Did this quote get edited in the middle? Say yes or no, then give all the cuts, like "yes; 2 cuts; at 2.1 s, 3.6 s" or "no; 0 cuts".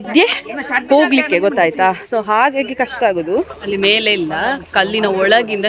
yes; 1 cut; at 3.7 s